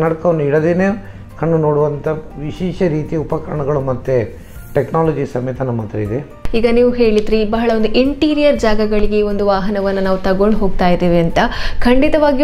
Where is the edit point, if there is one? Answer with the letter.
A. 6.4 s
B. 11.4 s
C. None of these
A